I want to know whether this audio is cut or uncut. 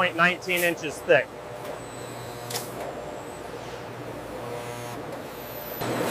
uncut